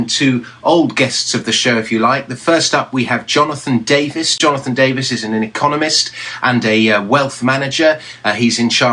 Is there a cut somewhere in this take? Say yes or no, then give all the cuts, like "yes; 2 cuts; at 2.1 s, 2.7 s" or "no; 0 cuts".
yes; 1 cut; at 6.4 s